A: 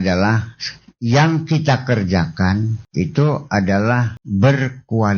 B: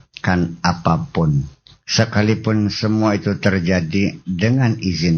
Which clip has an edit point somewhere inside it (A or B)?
A